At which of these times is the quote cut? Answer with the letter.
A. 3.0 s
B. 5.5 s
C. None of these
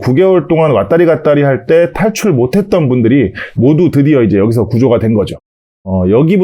B